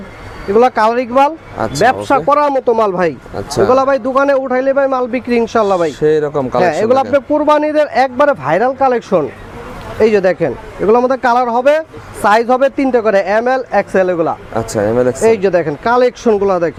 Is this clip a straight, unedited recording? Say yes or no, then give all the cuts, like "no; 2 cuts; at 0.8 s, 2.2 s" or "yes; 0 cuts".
yes; 0 cuts